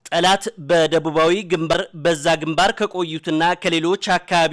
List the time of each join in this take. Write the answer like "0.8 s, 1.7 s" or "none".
1.7 s